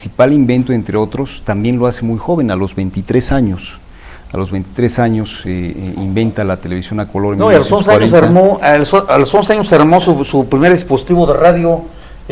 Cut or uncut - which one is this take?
uncut